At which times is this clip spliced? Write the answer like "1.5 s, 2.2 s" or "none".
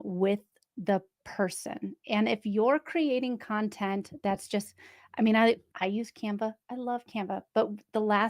5.7 s